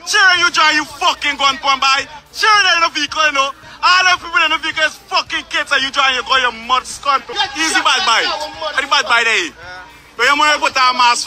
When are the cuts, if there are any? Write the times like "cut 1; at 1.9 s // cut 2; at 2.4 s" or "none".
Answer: cut 1; at 7.3 s